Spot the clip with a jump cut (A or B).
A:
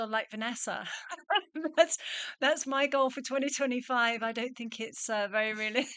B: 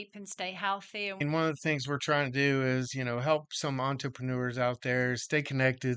B